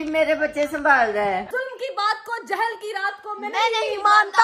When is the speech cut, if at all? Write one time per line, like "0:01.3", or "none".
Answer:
0:01.5